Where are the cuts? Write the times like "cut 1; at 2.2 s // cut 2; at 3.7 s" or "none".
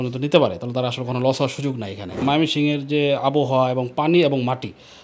cut 1; at 2.2 s